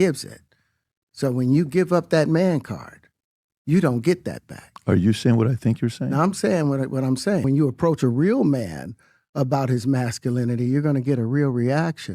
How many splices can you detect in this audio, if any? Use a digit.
1